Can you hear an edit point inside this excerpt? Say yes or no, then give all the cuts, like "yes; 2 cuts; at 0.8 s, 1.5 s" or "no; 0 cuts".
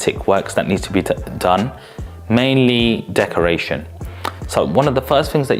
no; 0 cuts